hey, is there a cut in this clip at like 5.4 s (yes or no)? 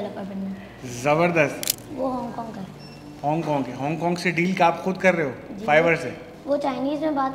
no